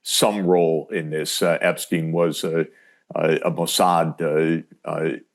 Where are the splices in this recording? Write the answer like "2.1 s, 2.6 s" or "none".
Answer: none